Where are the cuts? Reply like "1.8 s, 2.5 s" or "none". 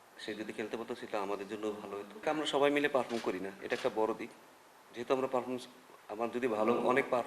2.1 s